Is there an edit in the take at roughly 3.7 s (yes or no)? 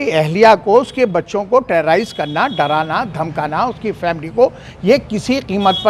no